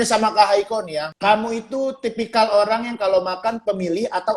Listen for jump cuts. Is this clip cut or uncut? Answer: cut